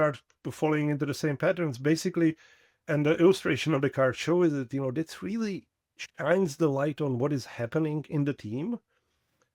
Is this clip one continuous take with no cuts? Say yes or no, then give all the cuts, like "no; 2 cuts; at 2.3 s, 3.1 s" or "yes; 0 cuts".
no; 1 cut; at 2.9 s